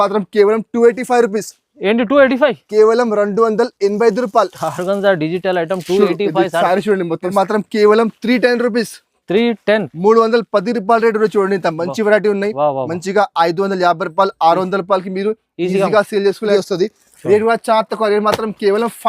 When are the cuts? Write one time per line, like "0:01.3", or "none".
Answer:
0:07.3
0:16.5